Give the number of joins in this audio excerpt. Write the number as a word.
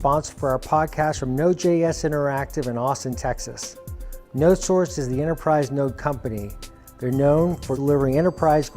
one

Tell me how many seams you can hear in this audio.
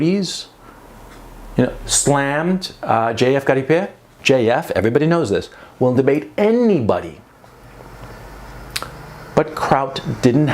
one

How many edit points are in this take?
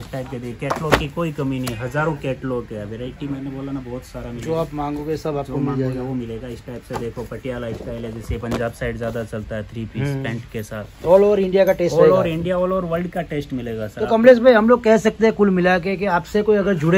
zero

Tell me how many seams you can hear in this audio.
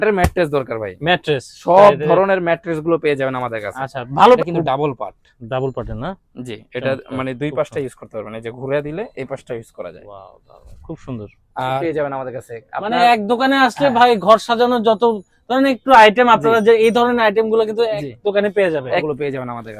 three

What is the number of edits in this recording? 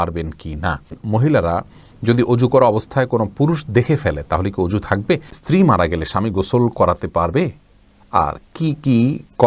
two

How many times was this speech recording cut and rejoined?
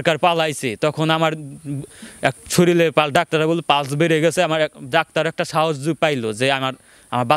zero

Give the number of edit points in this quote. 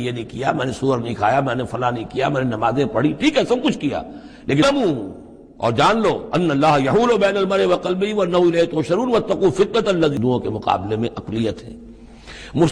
two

